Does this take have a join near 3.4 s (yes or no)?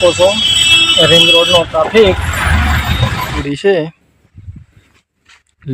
yes